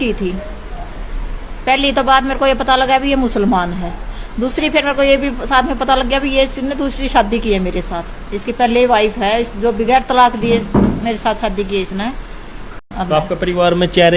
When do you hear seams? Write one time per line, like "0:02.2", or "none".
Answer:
0:12.9